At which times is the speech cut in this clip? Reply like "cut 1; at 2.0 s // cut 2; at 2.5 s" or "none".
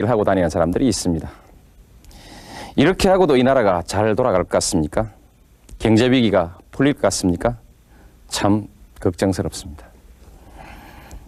none